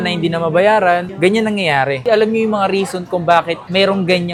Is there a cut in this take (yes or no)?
no